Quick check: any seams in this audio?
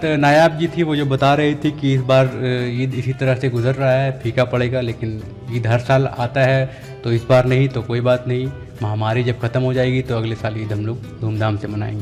no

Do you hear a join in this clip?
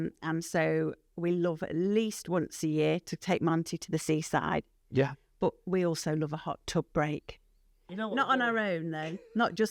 yes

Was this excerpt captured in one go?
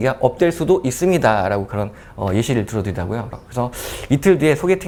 yes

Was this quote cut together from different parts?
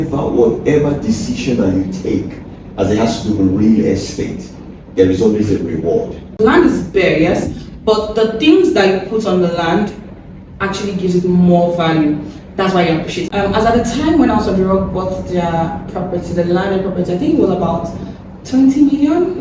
yes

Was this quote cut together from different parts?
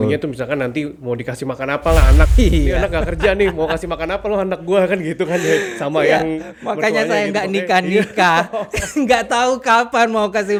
no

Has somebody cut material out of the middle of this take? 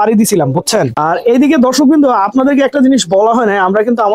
yes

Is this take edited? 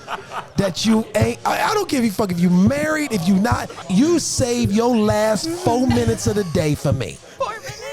yes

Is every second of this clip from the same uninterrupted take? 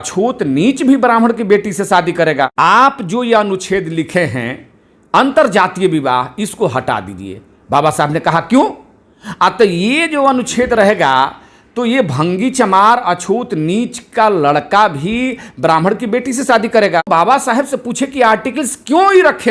no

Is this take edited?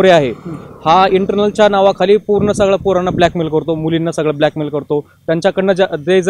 no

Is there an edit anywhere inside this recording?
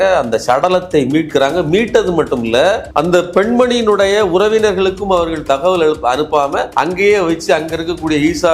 yes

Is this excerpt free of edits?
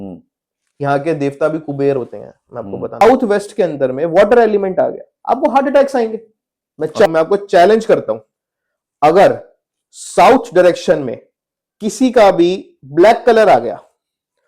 no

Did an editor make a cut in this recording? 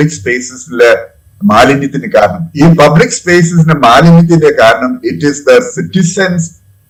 no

